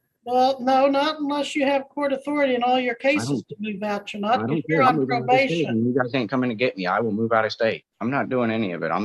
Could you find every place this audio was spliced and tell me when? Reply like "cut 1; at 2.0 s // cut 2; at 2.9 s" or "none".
cut 1; at 7.9 s